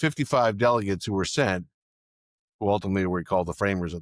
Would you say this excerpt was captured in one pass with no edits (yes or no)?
yes